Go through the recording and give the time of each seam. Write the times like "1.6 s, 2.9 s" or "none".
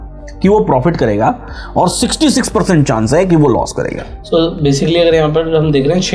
none

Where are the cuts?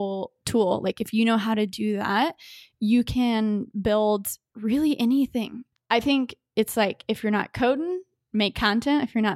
5.6 s

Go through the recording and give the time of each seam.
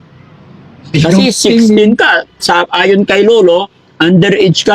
none

